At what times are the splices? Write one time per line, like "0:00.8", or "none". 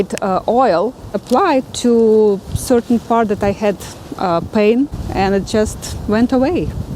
0:01.2
0:05.0